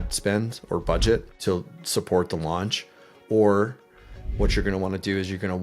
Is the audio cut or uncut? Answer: cut